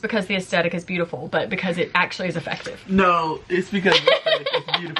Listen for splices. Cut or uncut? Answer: uncut